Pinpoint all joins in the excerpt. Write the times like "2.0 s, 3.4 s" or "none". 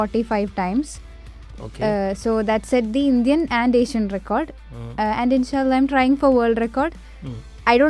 none